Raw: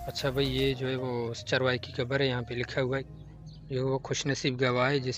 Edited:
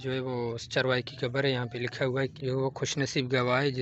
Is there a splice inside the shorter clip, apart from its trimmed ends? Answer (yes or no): yes